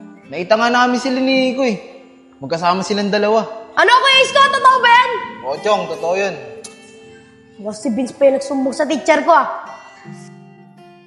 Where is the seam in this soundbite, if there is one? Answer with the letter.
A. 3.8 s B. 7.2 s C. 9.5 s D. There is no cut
C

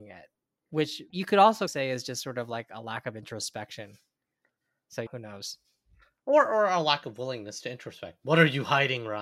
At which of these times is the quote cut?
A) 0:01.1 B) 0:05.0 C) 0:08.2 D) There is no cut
A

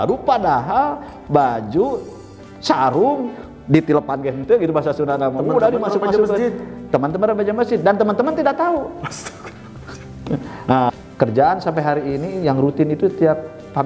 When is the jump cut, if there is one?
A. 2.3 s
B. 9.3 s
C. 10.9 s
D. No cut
C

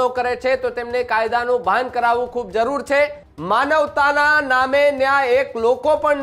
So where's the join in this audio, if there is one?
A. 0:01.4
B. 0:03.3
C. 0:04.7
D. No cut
B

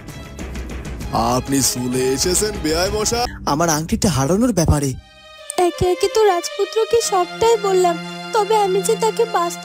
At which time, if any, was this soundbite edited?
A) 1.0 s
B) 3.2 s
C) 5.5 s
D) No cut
B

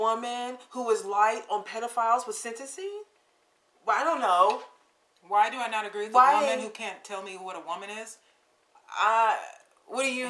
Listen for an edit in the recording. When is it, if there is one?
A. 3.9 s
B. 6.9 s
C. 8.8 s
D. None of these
D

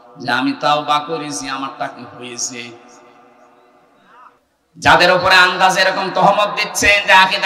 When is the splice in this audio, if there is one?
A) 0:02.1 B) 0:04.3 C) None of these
B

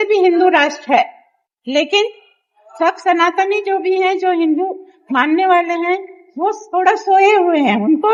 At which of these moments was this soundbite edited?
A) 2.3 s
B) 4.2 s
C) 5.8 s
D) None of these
D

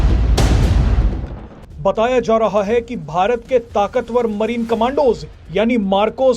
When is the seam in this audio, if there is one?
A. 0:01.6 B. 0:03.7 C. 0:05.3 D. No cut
A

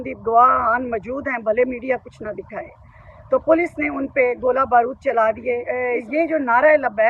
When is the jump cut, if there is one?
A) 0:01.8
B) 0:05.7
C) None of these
B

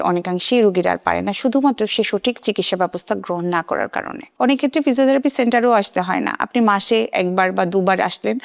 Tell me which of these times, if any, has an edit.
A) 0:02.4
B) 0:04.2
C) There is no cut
B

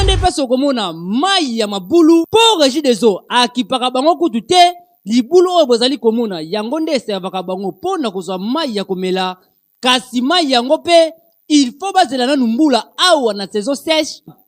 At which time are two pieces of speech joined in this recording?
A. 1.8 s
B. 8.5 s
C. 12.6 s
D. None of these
D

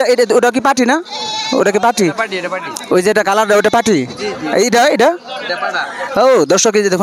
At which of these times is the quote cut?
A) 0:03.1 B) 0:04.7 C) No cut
C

